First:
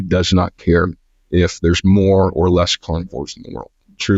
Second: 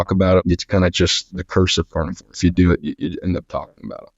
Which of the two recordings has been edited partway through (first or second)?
second